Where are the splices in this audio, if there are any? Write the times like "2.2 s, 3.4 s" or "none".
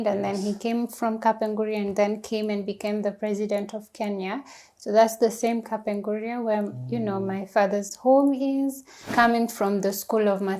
9.1 s